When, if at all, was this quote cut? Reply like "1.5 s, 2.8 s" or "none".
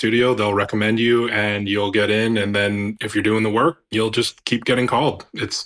3.0 s, 3.8 s